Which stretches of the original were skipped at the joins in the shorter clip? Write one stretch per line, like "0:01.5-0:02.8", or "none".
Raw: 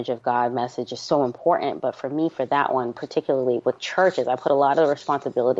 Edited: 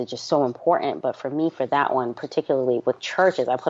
none